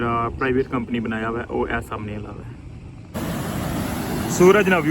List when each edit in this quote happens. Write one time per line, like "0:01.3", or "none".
0:03.1